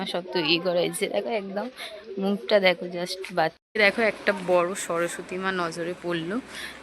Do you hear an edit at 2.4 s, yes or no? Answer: no